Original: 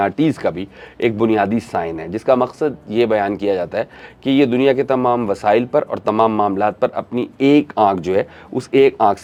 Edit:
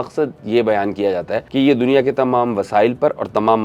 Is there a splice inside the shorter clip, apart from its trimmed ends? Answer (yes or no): yes